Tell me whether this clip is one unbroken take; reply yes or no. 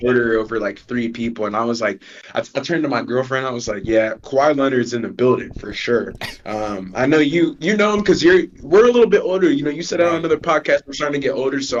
yes